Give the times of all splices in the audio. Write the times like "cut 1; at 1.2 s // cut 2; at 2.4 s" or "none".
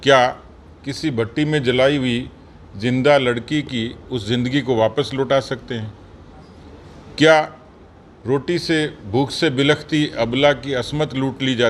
none